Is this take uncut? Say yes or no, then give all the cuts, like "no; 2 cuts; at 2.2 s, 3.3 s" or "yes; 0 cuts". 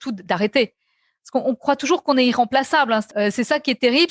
no; 1 cut; at 3.1 s